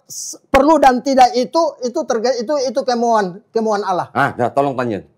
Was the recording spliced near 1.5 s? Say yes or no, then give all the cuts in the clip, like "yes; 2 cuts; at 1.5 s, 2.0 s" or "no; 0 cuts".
no; 0 cuts